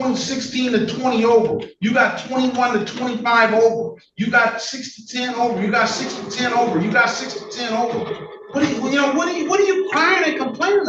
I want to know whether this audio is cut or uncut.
uncut